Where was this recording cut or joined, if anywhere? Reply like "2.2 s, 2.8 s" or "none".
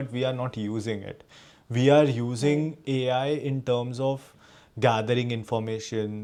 none